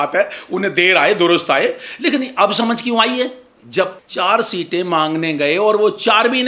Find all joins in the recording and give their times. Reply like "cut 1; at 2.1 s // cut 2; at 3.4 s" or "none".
cut 1; at 4.0 s